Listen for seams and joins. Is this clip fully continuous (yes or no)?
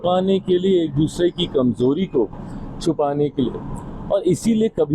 yes